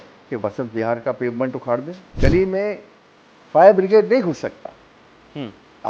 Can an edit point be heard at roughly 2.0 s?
yes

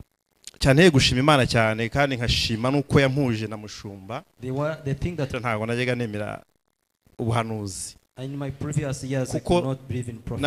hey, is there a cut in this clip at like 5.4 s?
yes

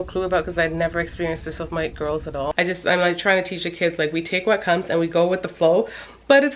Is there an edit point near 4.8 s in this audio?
no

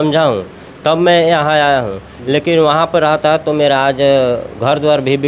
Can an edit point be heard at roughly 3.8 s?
no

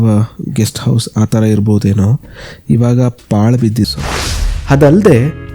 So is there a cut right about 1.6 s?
no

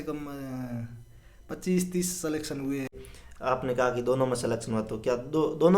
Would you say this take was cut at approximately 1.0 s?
no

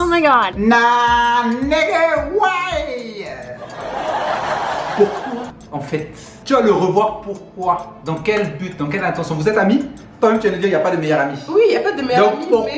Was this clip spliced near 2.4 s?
no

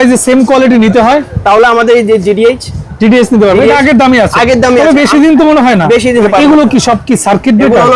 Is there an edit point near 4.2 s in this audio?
no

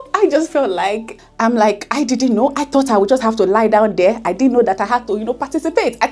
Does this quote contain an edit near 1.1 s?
yes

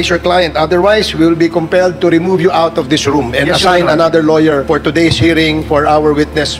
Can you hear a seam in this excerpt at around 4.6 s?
yes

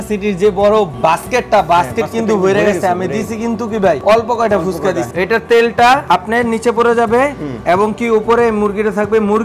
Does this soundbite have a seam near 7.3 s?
no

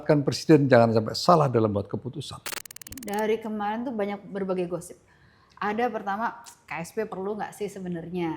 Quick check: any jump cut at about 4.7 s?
no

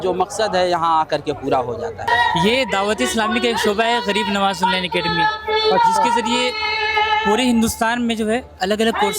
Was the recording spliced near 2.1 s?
yes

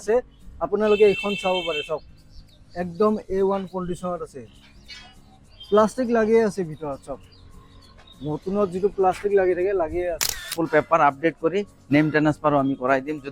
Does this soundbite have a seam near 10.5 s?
yes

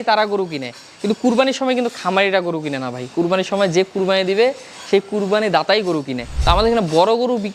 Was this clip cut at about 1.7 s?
no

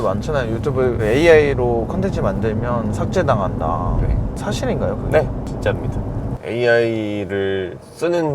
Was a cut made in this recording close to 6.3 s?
yes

